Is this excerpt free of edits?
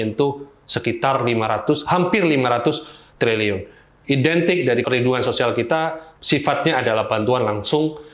no; 2 cuts; at 3.9 s, 4.8 s

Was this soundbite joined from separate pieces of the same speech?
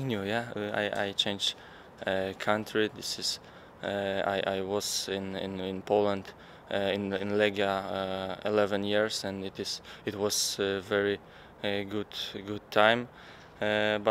yes; 1 cut; at 6.8 s

